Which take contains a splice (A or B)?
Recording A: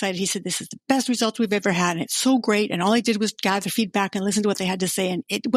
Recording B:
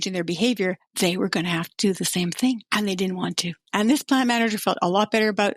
B